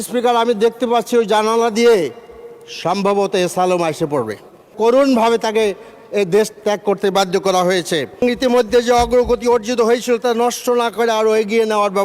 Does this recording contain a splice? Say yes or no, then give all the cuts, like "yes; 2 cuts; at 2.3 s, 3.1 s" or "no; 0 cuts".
yes; 2 cuts; at 4.7 s, 8.2 s